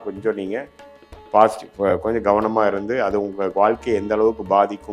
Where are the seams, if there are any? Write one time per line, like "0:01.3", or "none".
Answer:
none